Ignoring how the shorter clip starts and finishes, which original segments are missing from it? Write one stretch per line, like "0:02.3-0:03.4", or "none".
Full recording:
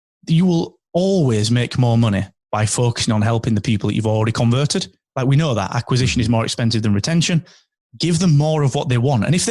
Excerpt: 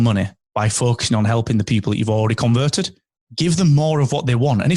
0:05.0-0:07.7

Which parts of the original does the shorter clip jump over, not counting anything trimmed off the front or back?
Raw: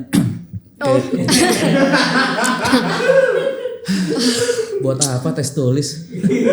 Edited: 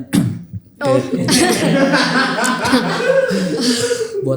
0:03.4-0:03.9

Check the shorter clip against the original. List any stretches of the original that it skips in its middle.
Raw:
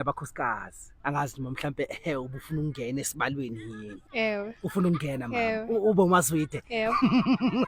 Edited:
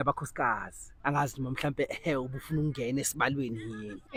none

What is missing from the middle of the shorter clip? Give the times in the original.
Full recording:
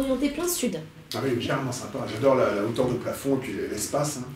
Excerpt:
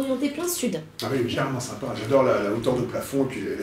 0:00.9-0:01.0

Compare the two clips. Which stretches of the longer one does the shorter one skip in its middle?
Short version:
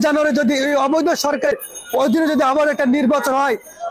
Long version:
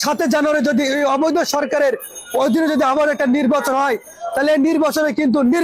0:01.8-0:01.9

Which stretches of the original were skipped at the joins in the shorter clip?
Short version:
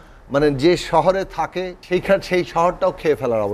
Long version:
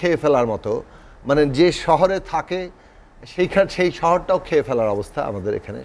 0:02.6-0:03.2

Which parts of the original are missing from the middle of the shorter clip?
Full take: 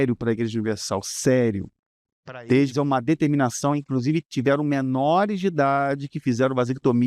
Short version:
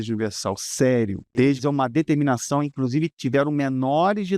0:01.7-0:02.3

